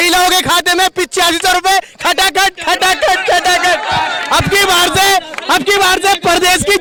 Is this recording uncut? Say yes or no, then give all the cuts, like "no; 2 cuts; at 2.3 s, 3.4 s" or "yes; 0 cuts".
yes; 0 cuts